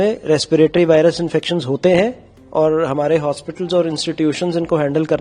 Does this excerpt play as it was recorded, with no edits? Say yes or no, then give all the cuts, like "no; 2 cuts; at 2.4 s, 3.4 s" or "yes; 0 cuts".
yes; 0 cuts